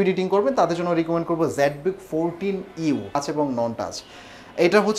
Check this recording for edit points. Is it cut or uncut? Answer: cut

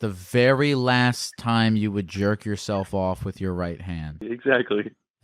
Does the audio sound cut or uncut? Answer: cut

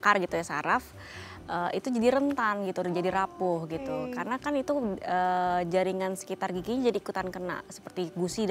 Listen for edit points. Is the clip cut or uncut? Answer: uncut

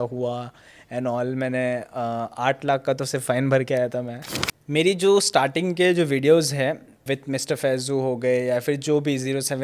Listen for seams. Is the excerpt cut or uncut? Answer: cut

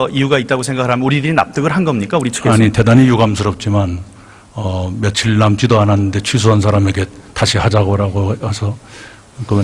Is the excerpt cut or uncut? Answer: cut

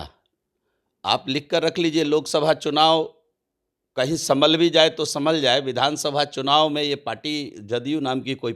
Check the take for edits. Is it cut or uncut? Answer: uncut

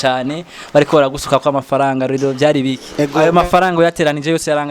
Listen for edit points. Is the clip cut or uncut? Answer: cut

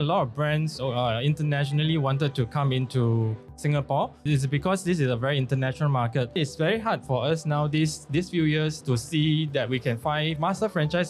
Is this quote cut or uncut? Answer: cut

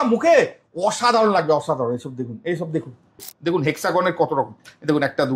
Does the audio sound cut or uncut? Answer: cut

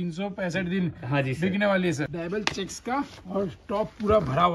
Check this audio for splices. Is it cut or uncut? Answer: cut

